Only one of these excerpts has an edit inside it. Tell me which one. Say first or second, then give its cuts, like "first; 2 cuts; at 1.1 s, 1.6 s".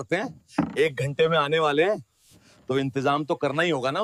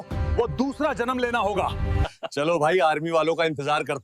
second; 1 cut; at 2.1 s